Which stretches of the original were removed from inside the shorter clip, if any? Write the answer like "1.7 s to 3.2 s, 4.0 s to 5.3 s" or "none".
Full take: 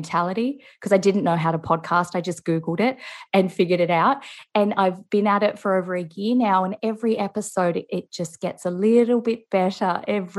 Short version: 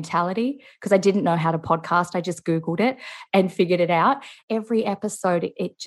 4.4 s to 6.7 s